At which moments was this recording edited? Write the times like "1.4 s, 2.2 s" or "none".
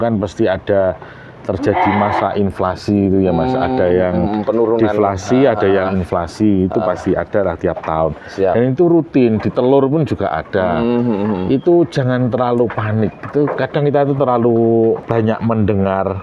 15.0 s